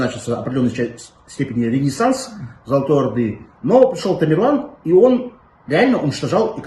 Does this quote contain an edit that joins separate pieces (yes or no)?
no